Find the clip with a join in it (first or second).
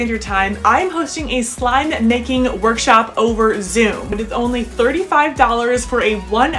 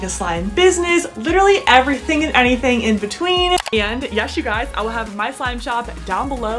second